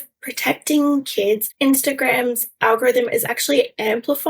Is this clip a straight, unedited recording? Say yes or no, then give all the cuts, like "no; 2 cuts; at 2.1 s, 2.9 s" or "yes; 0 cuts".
no; 1 cut; at 1.5 s